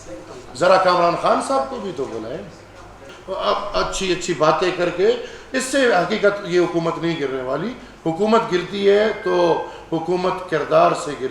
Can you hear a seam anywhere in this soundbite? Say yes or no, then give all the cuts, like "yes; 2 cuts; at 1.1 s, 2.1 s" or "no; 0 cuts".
yes; 1 cut; at 3.1 s